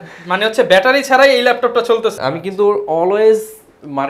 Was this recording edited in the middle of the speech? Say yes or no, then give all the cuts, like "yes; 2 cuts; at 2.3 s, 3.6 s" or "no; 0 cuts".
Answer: yes; 1 cut; at 2.2 s